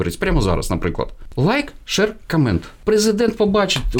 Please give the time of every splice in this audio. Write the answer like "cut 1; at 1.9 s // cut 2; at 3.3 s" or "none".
cut 1; at 1.3 s // cut 2; at 2.7 s